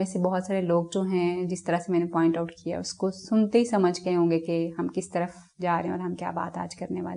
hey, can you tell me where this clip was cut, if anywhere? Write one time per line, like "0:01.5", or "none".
none